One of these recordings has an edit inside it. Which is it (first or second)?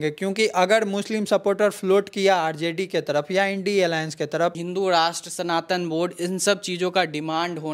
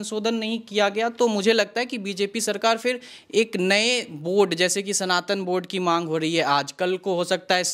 first